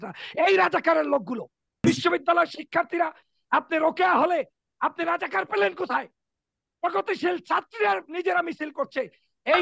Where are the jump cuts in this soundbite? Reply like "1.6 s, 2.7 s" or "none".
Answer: 1.9 s